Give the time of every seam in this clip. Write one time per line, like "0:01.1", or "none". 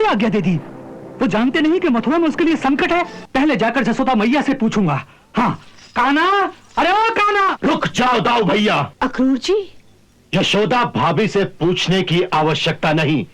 0:03.2
0:07.6
0:08.9